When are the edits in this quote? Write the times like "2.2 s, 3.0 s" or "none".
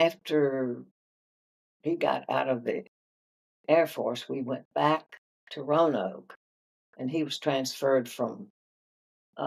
none